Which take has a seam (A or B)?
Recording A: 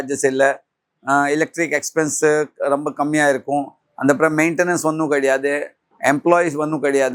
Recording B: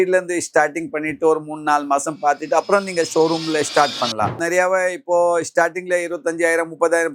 B